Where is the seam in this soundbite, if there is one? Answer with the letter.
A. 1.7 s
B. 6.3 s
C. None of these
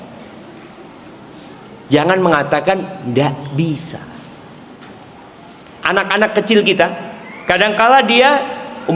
C